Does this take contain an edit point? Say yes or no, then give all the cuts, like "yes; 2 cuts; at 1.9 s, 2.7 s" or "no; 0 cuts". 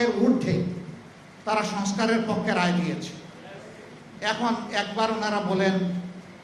no; 0 cuts